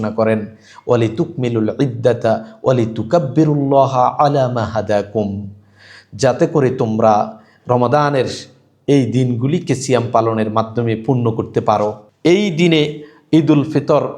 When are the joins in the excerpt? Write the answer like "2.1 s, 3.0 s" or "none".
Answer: 12.1 s